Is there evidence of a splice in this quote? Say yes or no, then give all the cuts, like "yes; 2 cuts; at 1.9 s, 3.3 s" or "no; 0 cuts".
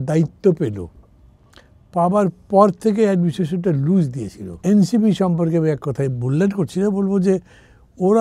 yes; 1 cut; at 4.6 s